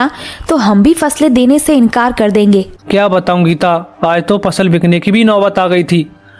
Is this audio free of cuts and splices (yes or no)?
no